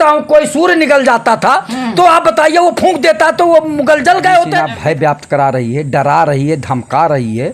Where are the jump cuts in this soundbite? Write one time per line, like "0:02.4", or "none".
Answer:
0:04.7